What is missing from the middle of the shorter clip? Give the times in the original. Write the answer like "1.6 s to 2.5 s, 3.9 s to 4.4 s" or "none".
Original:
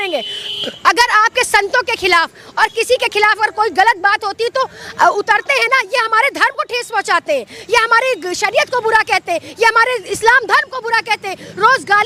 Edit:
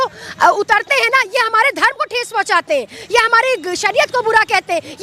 none